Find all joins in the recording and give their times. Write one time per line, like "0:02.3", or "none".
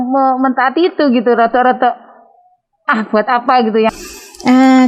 0:03.9